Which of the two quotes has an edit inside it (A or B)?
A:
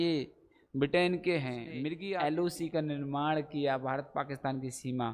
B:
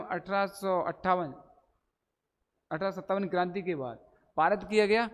A